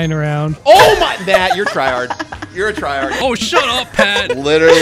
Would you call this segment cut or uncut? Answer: cut